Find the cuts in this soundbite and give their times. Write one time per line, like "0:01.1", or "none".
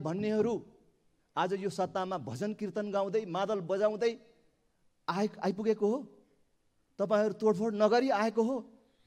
none